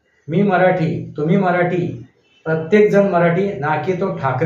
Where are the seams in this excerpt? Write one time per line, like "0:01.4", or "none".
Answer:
none